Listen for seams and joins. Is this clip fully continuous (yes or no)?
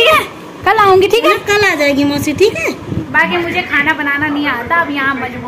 no